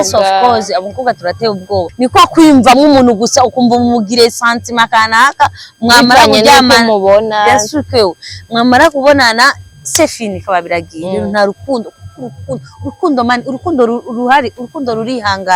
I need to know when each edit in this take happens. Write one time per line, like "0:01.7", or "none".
0:01.9